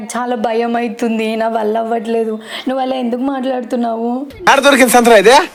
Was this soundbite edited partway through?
no; 0 cuts

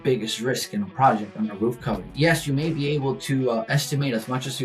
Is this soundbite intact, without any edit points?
no; 1 cut; at 2.1 s

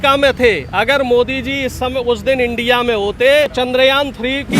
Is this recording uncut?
no; 1 cut; at 3.5 s

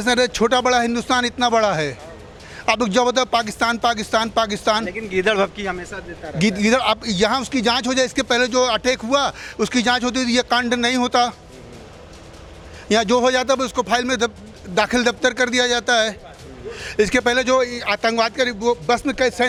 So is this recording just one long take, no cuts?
yes; 0 cuts

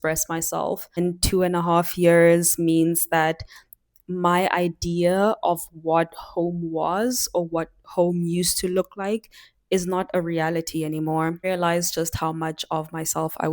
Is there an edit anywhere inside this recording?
yes; 2 cuts; at 1.0 s, 11.4 s

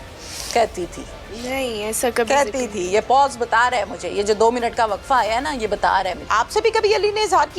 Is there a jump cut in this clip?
yes; 1 cut; at 6.3 s

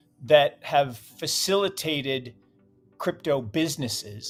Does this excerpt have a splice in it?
no; 0 cuts

